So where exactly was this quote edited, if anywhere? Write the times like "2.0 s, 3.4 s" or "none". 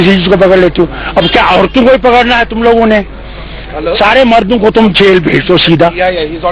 none